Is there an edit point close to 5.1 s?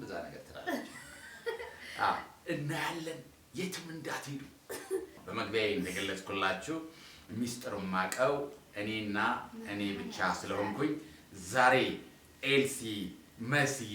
yes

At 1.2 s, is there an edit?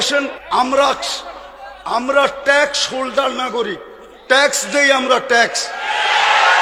no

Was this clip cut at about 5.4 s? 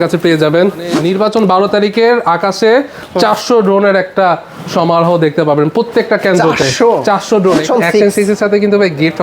no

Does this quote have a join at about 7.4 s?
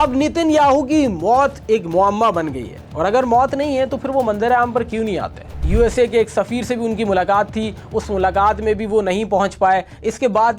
no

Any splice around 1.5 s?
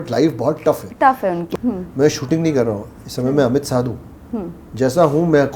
yes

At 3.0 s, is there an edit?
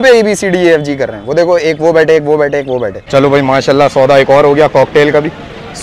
yes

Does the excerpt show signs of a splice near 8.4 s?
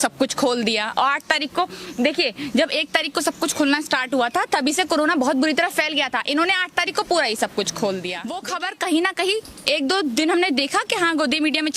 yes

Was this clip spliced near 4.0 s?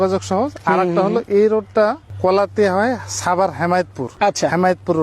yes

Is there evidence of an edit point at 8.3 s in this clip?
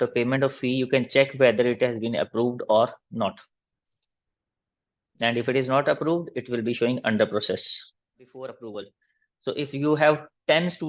yes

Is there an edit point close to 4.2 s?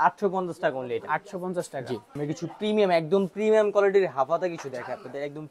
no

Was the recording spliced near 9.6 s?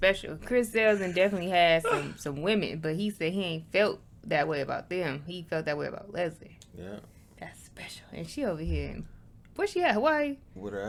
no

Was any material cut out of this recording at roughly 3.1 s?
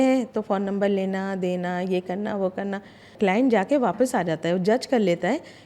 yes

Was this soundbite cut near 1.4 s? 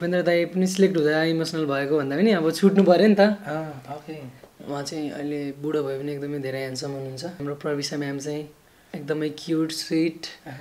no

